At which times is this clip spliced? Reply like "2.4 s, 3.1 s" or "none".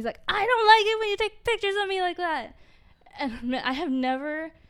none